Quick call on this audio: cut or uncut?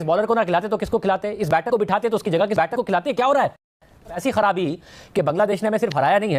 cut